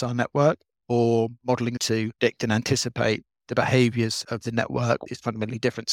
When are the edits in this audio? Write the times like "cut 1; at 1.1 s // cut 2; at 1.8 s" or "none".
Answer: cut 1; at 1.8 s // cut 2; at 4.7 s